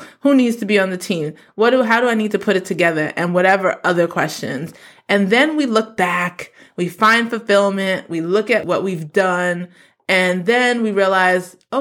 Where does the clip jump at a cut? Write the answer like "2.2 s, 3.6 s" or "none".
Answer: 8.6 s